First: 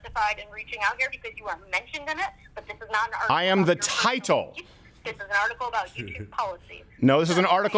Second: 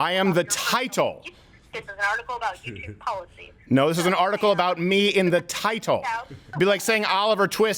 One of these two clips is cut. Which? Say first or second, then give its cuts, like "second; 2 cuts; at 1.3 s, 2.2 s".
second; 1 cut; at 6.5 s